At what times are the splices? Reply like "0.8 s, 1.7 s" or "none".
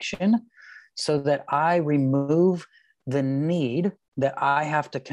4.0 s